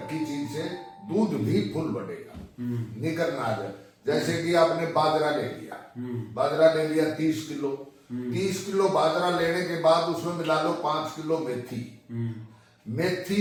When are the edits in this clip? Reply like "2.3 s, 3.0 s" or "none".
none